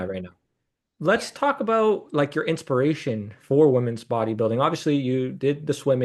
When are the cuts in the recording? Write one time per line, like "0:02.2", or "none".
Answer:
0:00.9